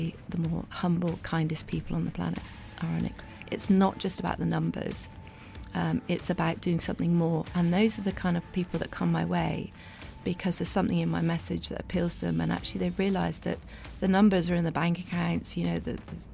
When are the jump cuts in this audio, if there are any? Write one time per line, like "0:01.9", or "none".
0:03.2